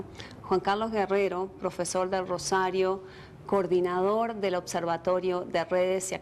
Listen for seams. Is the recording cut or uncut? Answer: uncut